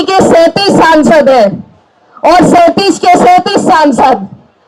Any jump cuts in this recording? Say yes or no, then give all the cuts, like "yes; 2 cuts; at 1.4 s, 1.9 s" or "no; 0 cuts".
no; 0 cuts